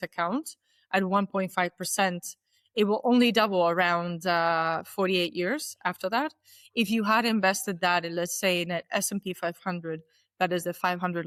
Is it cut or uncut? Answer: uncut